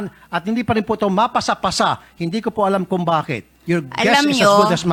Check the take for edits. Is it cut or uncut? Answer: uncut